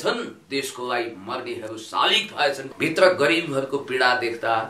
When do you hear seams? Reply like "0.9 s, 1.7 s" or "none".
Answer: 2.7 s